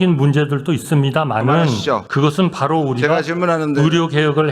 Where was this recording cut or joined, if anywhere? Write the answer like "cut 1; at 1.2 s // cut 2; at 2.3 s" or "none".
cut 1; at 2.1 s